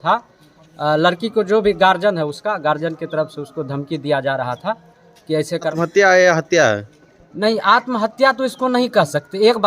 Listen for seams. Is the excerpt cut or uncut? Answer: cut